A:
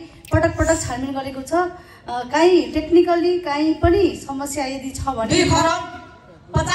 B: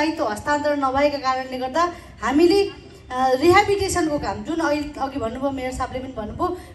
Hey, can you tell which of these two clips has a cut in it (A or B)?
A